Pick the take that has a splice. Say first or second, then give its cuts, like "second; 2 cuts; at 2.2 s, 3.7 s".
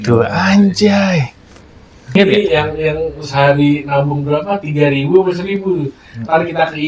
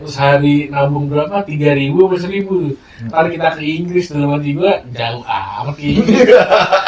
first; 1 cut; at 2.1 s